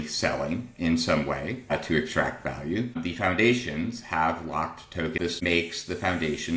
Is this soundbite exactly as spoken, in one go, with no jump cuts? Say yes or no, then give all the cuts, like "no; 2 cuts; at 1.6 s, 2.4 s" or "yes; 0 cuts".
no; 3 cuts; at 1.7 s, 3.0 s, 5.2 s